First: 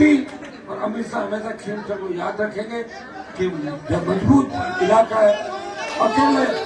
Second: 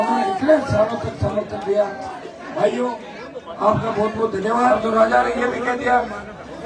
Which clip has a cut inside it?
second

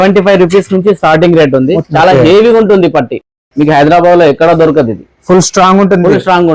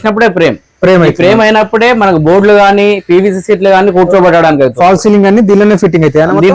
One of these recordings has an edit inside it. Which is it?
first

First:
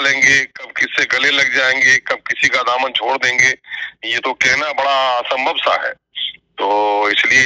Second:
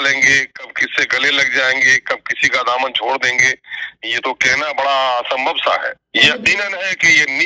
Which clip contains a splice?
second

